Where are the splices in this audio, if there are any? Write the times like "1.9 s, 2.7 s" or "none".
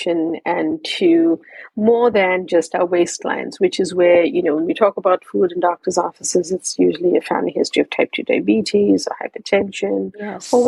none